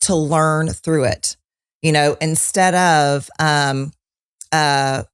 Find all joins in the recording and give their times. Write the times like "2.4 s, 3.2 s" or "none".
none